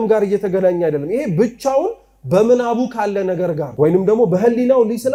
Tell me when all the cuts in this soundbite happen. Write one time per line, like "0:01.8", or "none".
none